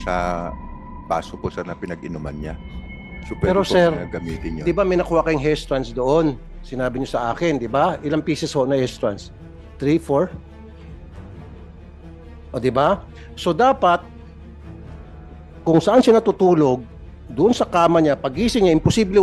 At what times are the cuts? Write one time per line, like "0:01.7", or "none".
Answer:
0:10.6
0:12.4
0:14.1
0:15.6